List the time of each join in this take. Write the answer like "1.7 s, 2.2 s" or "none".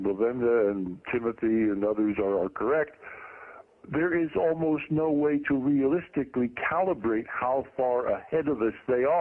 none